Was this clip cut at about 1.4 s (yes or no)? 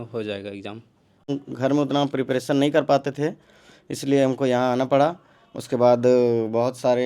yes